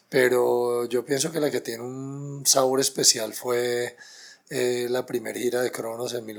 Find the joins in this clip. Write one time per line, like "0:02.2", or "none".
none